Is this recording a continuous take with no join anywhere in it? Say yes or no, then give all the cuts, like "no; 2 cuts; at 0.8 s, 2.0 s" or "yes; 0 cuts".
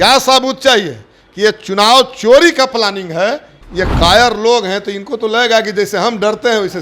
no; 1 cut; at 3.5 s